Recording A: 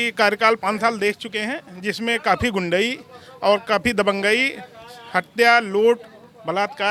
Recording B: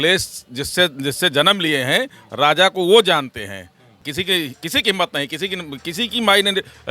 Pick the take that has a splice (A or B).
B